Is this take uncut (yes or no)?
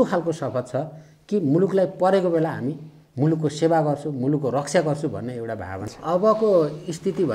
no